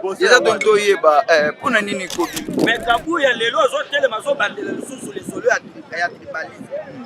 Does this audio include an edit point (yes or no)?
yes